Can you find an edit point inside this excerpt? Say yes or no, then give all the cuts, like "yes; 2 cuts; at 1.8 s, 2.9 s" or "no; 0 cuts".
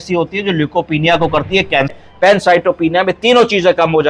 yes; 1 cut; at 1.9 s